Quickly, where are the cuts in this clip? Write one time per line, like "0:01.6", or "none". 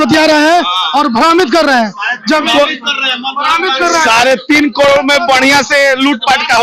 none